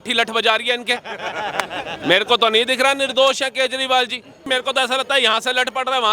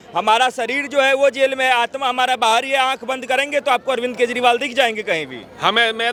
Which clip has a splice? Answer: first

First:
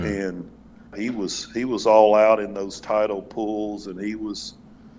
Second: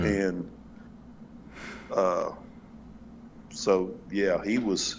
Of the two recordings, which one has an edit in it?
first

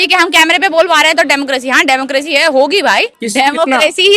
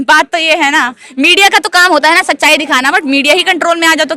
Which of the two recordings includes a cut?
first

